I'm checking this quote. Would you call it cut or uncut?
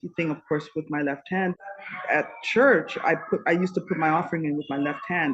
cut